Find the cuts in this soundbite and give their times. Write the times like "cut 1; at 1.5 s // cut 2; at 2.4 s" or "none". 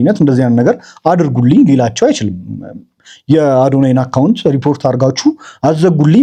none